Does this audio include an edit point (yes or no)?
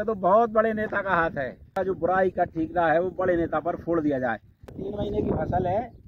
yes